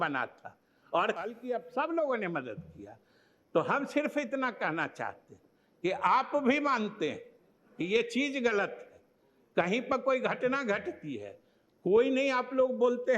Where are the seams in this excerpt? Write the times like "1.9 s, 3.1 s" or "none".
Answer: 1.2 s

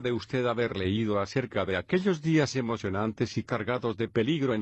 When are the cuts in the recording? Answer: 1.5 s

